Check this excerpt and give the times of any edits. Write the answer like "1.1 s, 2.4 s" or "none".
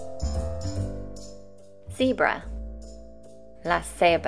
1.8 s

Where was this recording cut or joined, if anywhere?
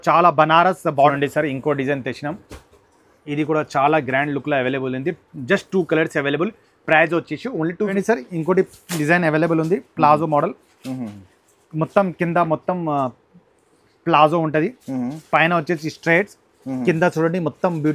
1.1 s, 7.9 s

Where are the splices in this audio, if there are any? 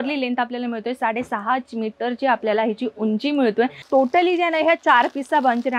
3.8 s

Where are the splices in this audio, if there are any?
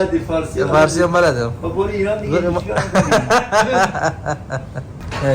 none

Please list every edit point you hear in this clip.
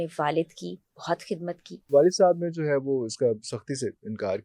1.9 s

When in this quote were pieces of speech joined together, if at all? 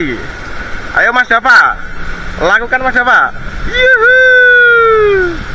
none

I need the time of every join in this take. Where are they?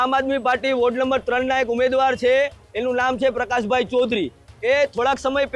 none

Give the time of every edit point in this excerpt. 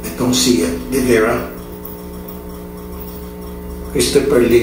1.7 s

